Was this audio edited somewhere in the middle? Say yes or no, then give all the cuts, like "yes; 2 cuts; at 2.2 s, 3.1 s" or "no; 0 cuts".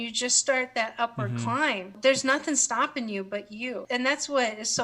yes; 2 cuts; at 1.9 s, 3.8 s